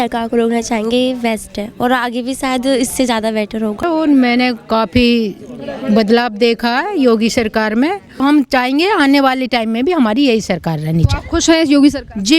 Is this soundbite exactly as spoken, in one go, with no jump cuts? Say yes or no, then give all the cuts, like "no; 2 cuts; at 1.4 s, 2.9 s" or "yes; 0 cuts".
no; 2 cuts; at 3.8 s, 8.2 s